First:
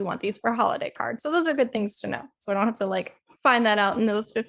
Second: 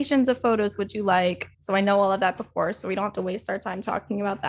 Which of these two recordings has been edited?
second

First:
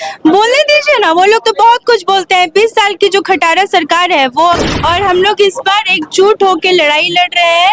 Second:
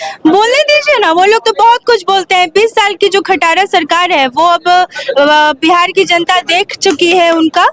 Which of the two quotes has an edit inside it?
first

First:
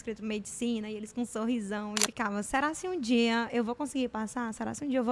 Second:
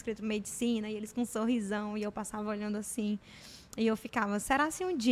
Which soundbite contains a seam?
first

